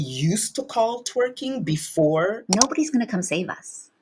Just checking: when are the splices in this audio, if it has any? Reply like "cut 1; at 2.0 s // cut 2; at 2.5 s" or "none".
cut 1; at 2.4 s